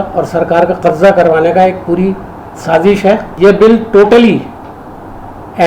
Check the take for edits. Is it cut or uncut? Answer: cut